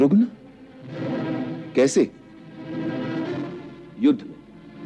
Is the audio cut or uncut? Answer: uncut